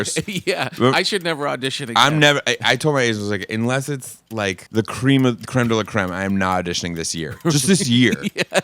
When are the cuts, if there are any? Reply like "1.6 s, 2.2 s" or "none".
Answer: 4.6 s